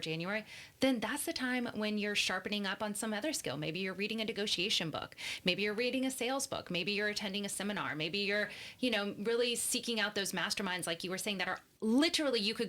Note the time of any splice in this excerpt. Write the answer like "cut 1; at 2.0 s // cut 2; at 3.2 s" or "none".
cut 1; at 11.7 s